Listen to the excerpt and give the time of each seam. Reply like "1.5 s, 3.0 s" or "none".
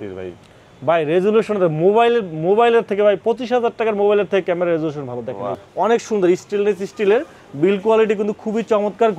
5.6 s